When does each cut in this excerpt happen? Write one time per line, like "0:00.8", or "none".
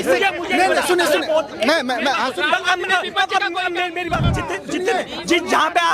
0:04.3